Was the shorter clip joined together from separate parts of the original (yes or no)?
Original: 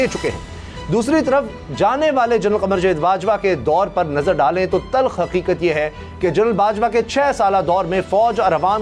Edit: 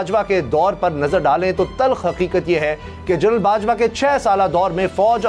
no